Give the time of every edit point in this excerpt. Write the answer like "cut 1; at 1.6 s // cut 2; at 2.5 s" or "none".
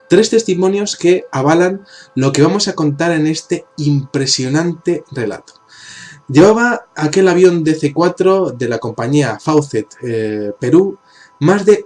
none

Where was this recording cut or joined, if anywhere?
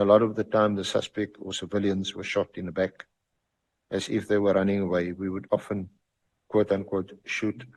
none

